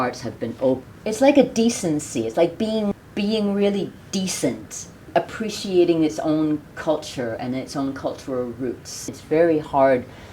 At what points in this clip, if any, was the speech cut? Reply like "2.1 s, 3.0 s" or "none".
0.8 s, 3.0 s, 9.1 s